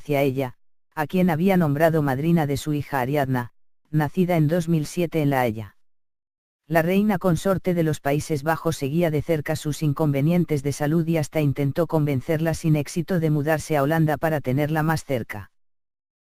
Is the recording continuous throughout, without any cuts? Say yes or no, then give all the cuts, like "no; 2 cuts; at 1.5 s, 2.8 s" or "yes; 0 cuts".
yes; 0 cuts